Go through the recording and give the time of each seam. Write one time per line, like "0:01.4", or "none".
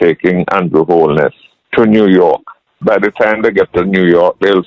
0:02.8